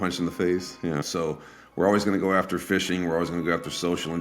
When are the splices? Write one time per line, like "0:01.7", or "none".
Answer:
0:01.1